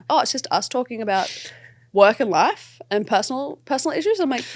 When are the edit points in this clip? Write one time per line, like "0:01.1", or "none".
none

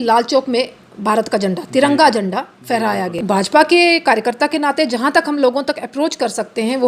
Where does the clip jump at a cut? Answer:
0:03.1

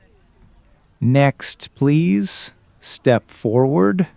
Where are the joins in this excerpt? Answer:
0:00.9

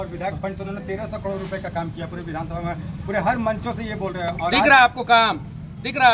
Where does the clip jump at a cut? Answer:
none

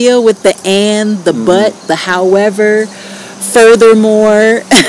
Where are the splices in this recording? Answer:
none

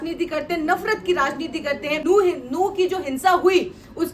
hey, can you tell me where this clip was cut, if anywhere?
0:02.0

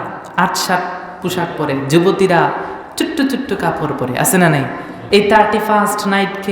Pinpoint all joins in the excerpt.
0:05.0

